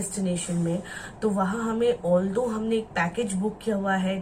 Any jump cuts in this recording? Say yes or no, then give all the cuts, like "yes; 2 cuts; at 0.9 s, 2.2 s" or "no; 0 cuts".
no; 0 cuts